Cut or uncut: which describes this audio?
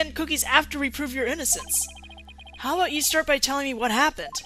uncut